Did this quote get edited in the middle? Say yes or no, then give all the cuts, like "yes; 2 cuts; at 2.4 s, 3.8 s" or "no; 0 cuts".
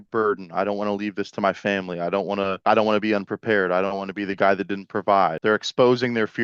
yes; 1 cut; at 5.4 s